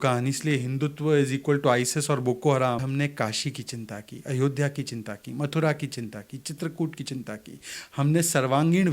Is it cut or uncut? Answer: cut